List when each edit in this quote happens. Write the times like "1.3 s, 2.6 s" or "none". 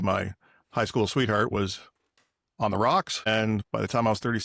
3.1 s